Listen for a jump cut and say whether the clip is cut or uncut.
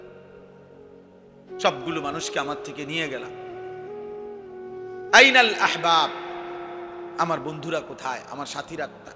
cut